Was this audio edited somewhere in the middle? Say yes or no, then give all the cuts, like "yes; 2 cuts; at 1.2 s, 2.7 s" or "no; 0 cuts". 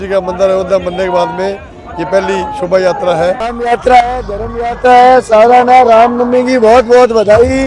yes; 1 cut; at 3.5 s